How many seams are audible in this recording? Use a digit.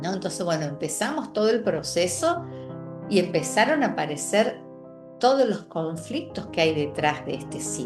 0